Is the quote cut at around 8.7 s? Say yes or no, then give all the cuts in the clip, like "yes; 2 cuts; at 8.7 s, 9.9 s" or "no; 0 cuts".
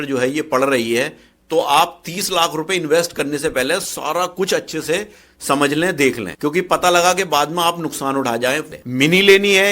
yes; 1 cut; at 8.7 s